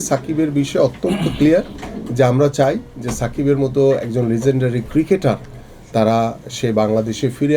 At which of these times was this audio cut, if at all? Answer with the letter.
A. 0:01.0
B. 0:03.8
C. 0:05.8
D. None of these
D